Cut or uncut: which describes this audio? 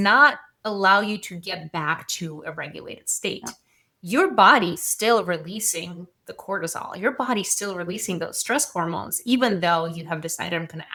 uncut